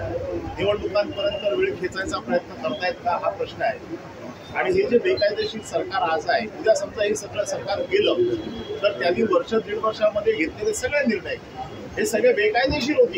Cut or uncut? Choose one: uncut